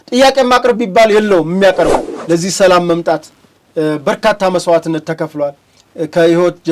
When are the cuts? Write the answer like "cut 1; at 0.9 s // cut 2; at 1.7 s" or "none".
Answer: cut 1; at 2.1 s